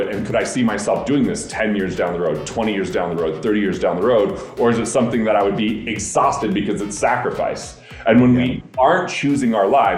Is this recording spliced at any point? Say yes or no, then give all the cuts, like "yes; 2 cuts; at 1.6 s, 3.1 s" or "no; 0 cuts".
no; 0 cuts